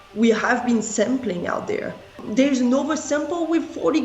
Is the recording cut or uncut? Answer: cut